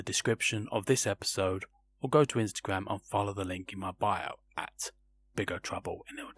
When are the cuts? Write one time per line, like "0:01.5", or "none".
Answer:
none

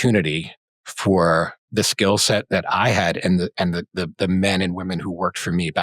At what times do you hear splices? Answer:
0:01.6

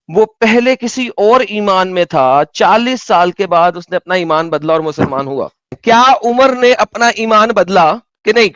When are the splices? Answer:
0:05.7

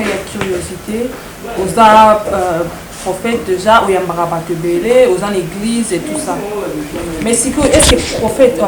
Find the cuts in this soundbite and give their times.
none

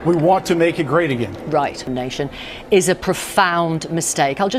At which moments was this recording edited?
0:01.9

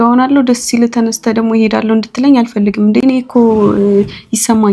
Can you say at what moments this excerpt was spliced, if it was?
none

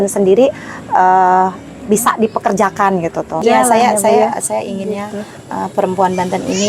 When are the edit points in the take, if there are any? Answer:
0:03.4

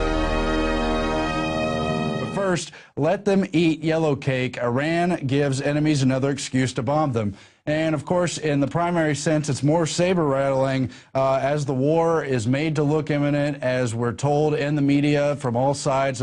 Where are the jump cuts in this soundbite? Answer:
0:02.6

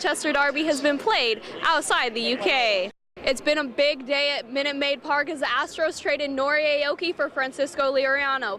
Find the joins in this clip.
0:03.0

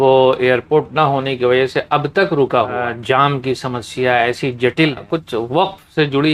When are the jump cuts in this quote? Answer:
0:02.8
0:05.0

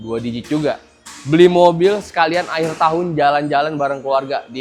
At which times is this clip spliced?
none

